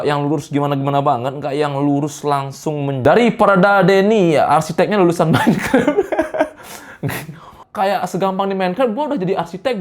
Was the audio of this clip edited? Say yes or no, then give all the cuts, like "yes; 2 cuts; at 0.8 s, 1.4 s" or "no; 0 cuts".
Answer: yes; 2 cuts; at 2.9 s, 7.6 s